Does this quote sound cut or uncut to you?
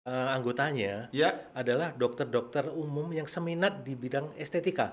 uncut